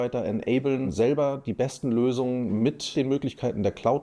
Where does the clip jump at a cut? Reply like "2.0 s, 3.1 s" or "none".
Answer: 2.9 s